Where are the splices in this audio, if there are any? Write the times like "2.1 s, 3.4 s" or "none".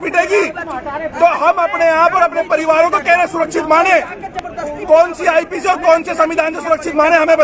none